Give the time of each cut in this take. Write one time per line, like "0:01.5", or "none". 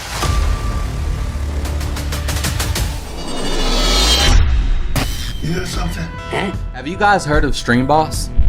0:03.0

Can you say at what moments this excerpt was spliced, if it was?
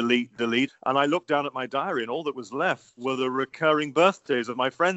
0:03.0

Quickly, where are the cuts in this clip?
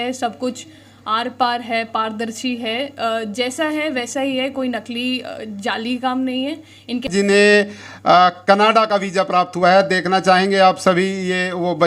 0:07.1

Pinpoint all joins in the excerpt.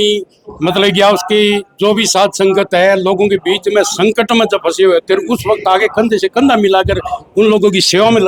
none

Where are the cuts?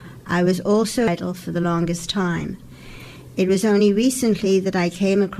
0:01.1

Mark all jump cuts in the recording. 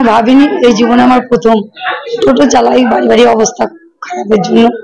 0:02.1

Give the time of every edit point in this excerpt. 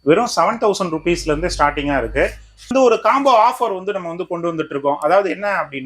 0:02.7

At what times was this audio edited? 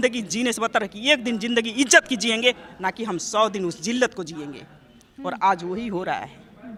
none

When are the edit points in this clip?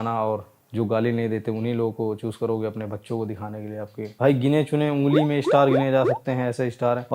0:04.1

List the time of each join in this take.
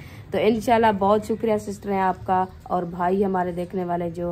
none

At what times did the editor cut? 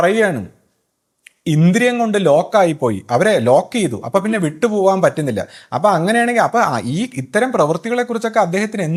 none

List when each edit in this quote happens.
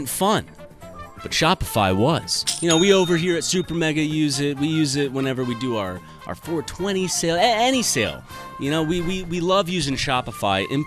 0:02.4

